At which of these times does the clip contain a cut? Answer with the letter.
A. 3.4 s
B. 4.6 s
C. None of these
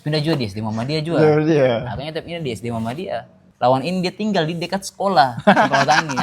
A